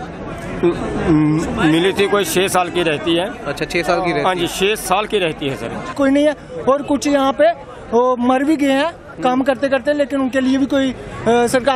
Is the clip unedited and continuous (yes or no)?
no